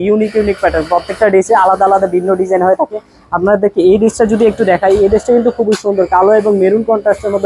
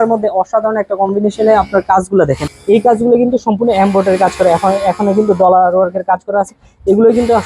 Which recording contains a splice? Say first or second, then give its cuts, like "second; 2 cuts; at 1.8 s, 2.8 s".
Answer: second; 1 cut; at 2.5 s